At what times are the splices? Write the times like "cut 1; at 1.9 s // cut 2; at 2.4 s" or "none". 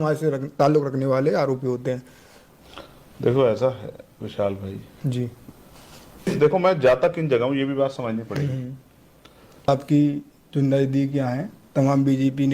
cut 1; at 6.3 s // cut 2; at 9.7 s